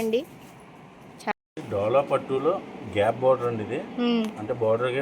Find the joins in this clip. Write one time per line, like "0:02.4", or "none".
0:01.3